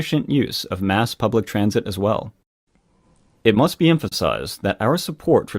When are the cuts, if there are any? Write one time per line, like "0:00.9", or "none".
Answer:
0:01.3